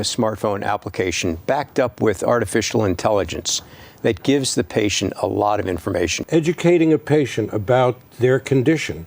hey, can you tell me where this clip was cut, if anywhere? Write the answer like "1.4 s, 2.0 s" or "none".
6.2 s